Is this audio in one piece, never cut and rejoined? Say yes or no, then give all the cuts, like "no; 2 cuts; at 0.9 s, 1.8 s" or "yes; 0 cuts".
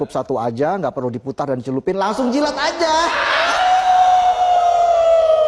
yes; 0 cuts